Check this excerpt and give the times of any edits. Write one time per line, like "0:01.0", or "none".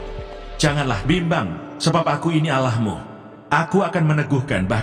none